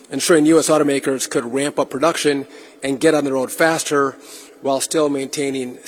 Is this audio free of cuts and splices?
yes; 0 cuts

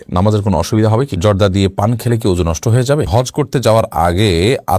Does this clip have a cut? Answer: yes; 2 cuts; at 1.1 s, 3.1 s

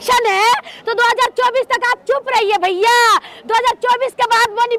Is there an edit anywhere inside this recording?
no; 0 cuts

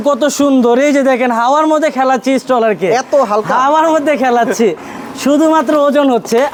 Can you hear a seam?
no; 0 cuts

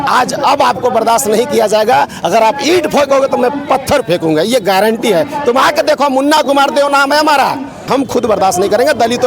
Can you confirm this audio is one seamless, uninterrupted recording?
no; 1 cut; at 7.9 s

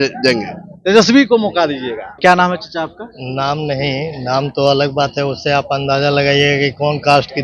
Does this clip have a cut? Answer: yes; 1 cut; at 2.0 s

